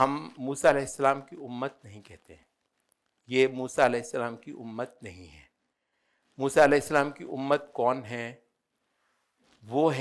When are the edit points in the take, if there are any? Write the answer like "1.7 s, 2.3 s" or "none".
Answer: none